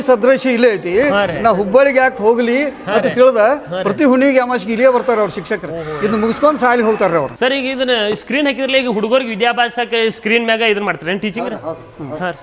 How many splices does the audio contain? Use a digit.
1